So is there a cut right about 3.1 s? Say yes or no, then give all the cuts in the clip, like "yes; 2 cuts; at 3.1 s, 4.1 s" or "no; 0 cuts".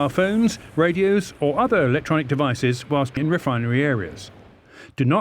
yes; 1 cut; at 3.1 s